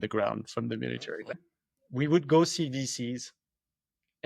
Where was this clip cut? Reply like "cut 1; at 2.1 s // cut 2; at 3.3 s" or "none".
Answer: cut 1; at 1.4 s